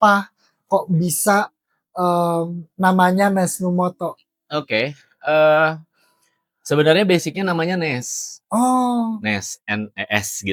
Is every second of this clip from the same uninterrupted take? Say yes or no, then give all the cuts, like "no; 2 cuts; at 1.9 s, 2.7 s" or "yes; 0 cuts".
yes; 0 cuts